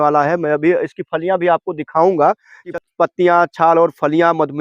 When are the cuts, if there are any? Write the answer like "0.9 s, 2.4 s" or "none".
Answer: 2.6 s